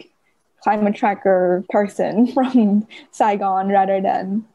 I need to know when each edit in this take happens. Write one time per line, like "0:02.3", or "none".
0:01.7

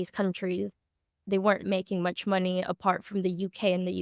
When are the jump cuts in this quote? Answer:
0:01.2

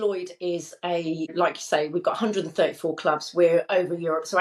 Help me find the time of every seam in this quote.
0:01.3

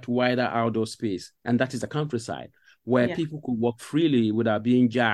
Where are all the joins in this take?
0:01.3

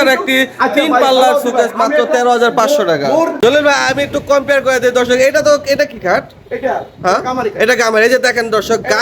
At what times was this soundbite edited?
0:03.3

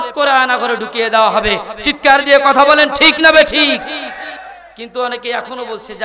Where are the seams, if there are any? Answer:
none

